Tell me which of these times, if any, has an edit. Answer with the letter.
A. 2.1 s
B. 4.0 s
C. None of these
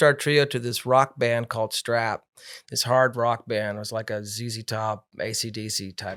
C